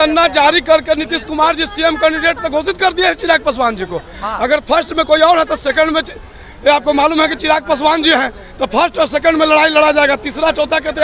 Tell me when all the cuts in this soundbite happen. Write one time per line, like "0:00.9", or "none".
none

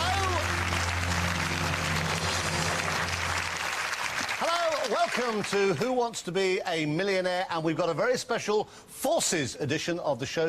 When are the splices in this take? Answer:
none

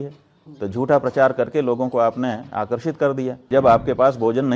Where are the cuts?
0:03.4

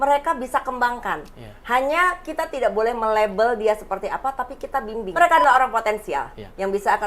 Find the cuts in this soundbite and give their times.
0:05.0

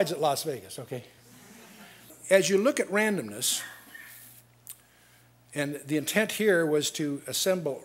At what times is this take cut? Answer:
0:03.8

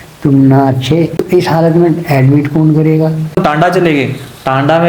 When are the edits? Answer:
0:01.2
0:03.3

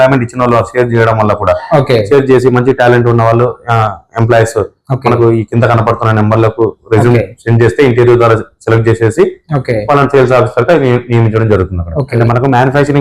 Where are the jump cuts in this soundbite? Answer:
none

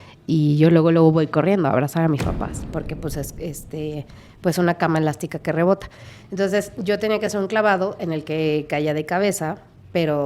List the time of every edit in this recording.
0:02.6

